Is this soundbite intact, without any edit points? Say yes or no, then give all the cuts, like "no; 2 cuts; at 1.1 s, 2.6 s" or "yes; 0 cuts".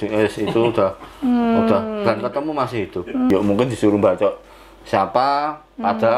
no; 1 cut; at 3.3 s